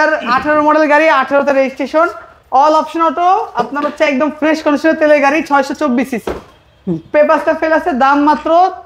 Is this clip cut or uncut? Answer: uncut